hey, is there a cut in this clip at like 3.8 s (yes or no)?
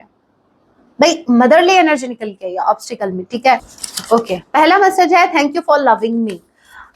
yes